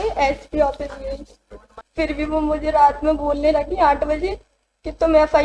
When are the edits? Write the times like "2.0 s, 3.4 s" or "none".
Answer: 1.8 s